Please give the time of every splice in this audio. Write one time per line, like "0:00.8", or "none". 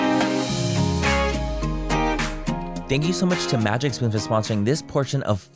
0:02.8